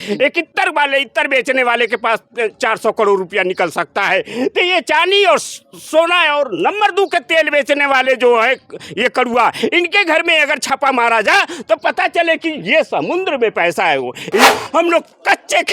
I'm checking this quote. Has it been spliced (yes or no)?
yes